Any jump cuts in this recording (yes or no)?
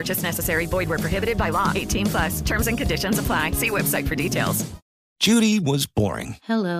yes